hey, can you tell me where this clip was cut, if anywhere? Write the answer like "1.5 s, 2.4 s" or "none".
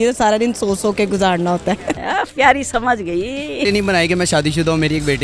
2.0 s, 3.6 s